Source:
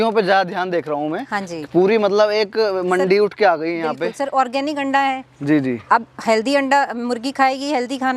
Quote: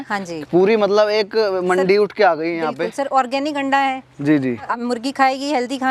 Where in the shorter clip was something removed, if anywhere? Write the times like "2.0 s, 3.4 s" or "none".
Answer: 4.7 s

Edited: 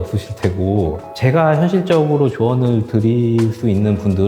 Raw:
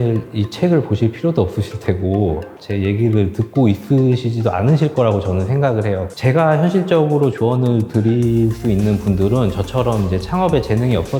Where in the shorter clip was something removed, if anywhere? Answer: 1.1 s

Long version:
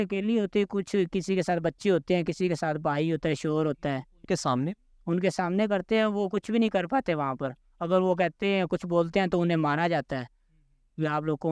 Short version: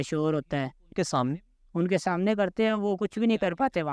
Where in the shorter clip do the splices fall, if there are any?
none

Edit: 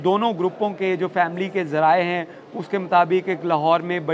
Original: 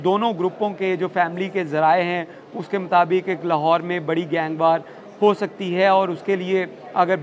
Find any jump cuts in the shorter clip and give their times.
none

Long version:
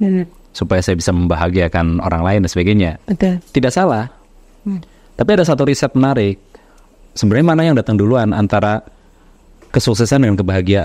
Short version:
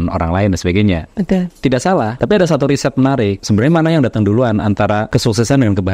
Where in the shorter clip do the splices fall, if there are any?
2.1 s, 3.4 s, 5.1 s

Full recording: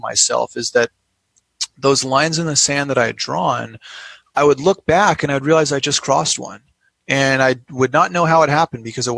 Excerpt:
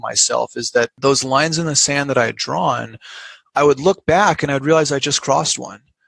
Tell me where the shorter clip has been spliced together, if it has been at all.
0.9 s

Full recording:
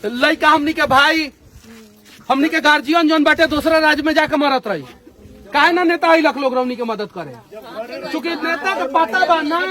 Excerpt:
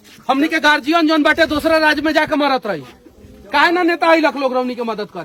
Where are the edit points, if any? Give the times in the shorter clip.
none

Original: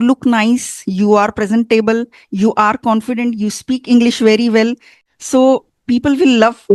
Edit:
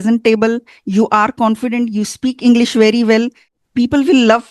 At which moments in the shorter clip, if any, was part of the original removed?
3.6 s

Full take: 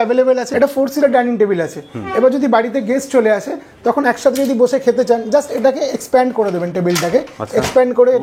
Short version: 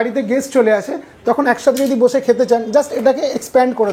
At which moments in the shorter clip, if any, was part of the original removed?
none

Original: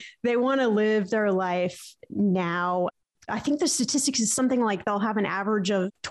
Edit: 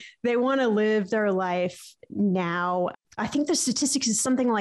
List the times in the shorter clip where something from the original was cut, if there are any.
3.1 s

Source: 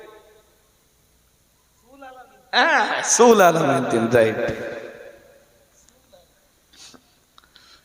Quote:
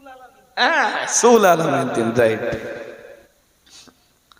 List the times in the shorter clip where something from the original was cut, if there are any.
3.3 s

